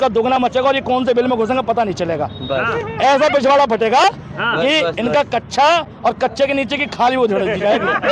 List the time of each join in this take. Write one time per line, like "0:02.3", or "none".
none